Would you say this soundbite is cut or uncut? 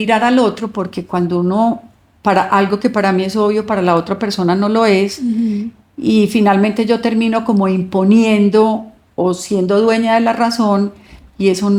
uncut